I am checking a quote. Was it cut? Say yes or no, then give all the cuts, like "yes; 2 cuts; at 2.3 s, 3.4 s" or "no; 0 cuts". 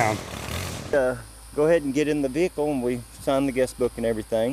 yes; 1 cut; at 0.9 s